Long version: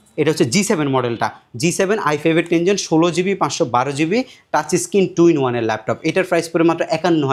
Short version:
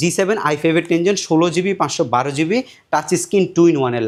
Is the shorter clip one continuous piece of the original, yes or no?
yes